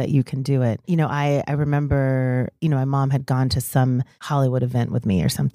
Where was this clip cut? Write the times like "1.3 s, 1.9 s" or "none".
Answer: 0.8 s, 2.5 s, 4.1 s